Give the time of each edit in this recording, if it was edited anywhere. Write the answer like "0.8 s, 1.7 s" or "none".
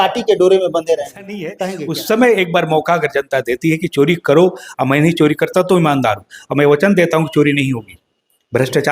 1.6 s